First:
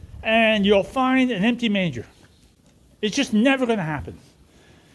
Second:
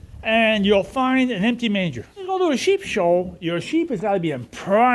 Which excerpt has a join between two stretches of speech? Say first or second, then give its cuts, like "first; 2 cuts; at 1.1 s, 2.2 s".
second; 1 cut; at 2.3 s